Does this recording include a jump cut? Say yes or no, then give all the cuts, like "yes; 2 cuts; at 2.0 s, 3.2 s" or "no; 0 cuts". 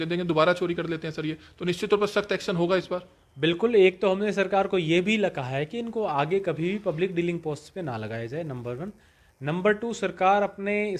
no; 0 cuts